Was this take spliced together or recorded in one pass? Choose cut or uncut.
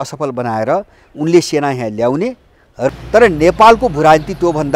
cut